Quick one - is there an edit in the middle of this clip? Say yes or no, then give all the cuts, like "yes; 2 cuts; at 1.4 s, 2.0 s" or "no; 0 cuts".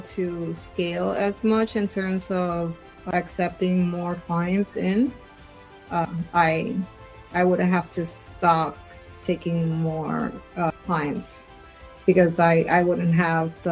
no; 0 cuts